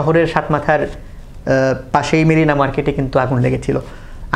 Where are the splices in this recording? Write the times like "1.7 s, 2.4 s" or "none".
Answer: none

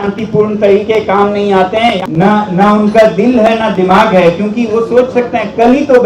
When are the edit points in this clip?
2.0 s

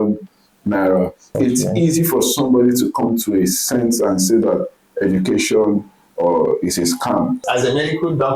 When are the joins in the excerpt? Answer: 1.3 s, 7.4 s

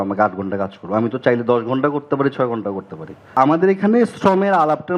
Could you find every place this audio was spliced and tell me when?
3.4 s

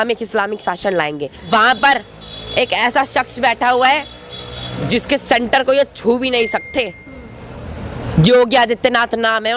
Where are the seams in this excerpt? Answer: 1.4 s

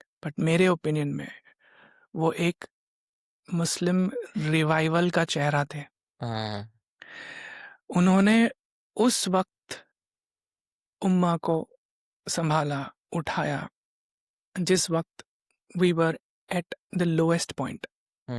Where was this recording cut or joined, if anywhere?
none

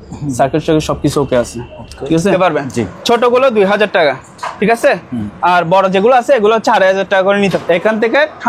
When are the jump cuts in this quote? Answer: 2.3 s, 7.6 s

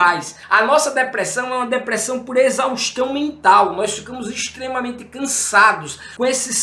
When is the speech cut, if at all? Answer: none

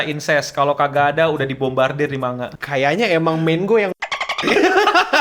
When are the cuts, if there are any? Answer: 2.5 s

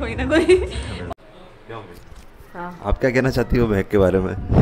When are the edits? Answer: 1.1 s

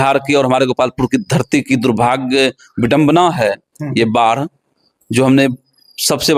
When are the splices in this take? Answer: none

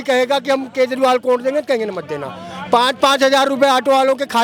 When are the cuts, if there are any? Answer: none

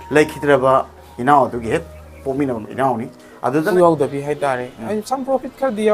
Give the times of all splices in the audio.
3.7 s

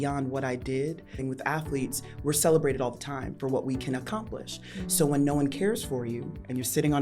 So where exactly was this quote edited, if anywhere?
1.2 s

